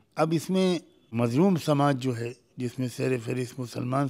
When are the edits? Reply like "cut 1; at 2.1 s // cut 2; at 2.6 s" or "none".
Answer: cut 1; at 1.0 s